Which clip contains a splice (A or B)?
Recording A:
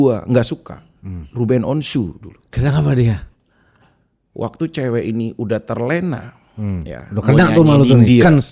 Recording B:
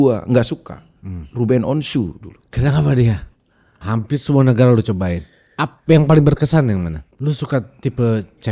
B